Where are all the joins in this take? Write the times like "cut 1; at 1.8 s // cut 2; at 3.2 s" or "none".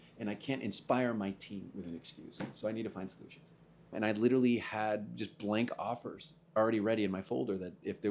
cut 1; at 3.9 s